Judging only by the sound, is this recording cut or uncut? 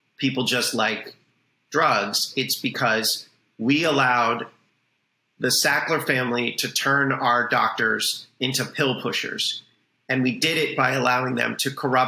uncut